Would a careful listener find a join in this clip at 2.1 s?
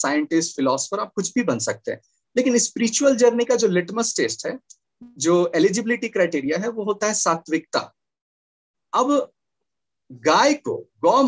no; 0 cuts

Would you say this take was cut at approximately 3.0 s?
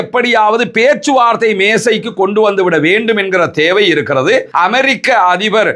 no; 1 cut; at 4.5 s

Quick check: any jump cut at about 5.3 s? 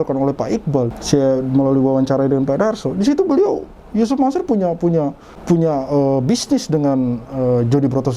yes; 1 cut; at 5.3 s

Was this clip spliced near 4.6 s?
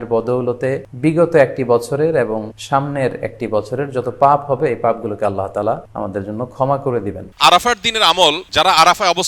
no; 5 cuts; at 0.9 s, 2.5 s, 5.9 s, 7.3 s, 8.4 s

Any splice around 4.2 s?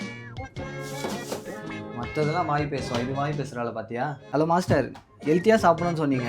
yes; 1 cut; at 4.2 s

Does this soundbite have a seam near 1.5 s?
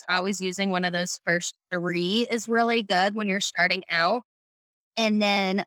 no; 0 cuts

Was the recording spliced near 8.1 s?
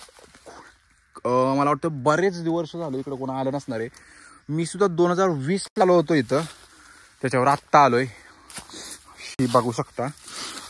no; 0 cuts

